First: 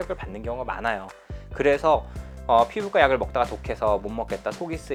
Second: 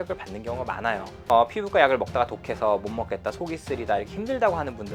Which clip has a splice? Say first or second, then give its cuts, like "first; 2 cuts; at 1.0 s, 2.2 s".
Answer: second; 1 cut; at 1.1 s